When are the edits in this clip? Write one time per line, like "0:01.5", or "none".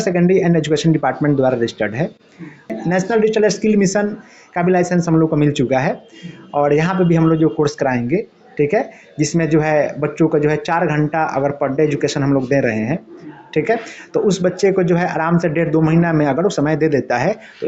0:02.7

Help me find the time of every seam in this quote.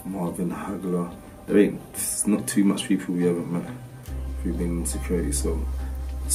none

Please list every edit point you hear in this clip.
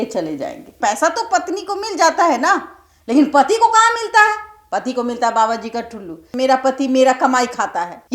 0:00.8
0:06.2

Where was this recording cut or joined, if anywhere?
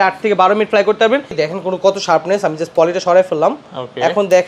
0:01.3

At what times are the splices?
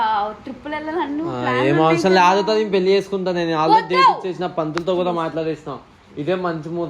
0:02.1

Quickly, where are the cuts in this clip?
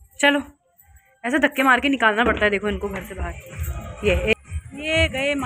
0:04.3

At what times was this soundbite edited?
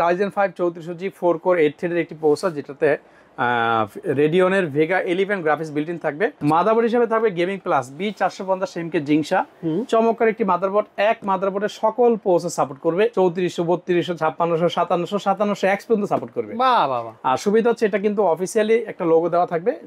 0:06.4
0:13.1

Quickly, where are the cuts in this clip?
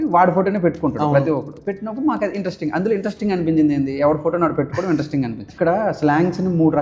0:05.5

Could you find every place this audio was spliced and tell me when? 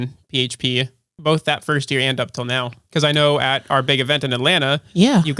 0:01.1
0:02.8

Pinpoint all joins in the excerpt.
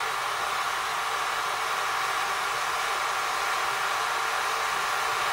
none

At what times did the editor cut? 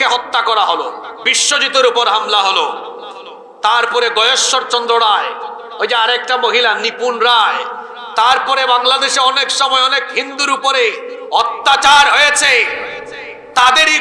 none

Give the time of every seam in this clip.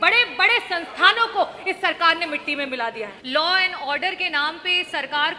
0:03.2

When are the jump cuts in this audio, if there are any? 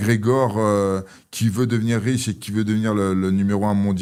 none

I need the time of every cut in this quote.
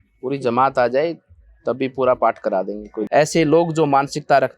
0:02.9

